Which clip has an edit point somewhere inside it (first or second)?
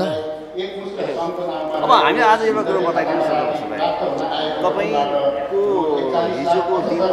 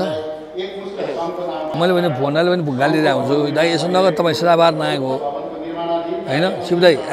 second